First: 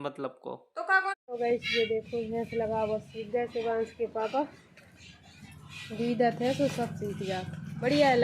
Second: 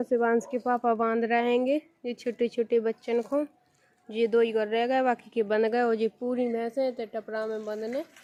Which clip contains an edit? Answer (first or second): first